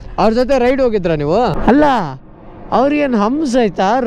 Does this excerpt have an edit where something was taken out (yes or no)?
yes